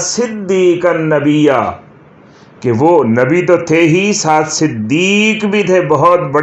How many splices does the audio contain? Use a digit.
0